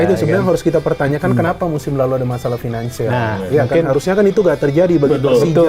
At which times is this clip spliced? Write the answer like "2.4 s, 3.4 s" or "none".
none